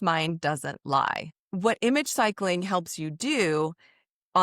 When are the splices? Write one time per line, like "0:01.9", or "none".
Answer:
0:01.4